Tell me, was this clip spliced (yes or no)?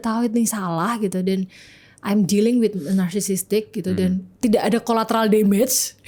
no